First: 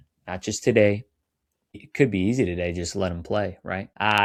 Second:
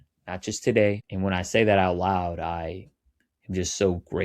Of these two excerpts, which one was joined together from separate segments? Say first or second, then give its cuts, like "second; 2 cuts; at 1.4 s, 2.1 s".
second; 1 cut; at 1.1 s